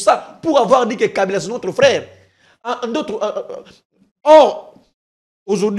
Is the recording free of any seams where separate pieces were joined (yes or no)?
yes